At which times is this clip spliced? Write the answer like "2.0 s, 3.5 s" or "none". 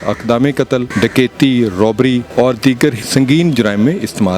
0.9 s, 2.3 s, 3.0 s